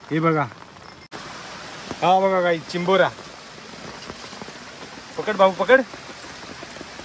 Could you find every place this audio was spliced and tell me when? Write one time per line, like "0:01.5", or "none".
0:01.0